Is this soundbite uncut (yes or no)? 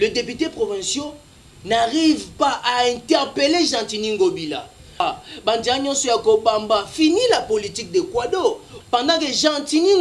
no